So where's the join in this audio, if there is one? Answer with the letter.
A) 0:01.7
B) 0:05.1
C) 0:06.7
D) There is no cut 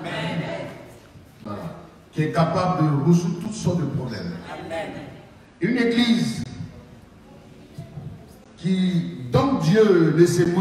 D